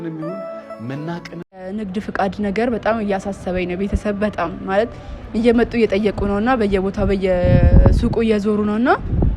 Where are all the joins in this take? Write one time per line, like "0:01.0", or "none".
0:01.7